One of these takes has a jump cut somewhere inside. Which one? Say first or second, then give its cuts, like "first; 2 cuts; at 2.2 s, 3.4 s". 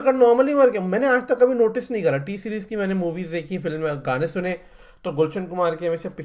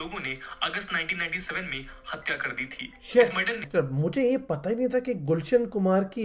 second; 1 cut; at 3.7 s